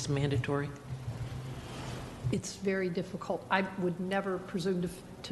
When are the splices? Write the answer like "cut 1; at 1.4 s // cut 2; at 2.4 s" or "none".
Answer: cut 1; at 2.1 s